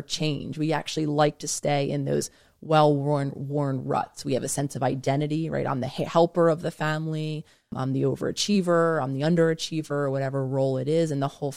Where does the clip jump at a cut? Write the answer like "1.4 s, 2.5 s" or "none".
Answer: 7.7 s